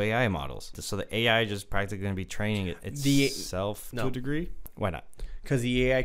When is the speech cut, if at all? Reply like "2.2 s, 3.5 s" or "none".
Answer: 0.8 s, 4.6 s